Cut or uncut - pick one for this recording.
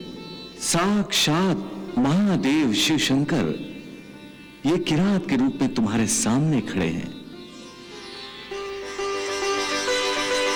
uncut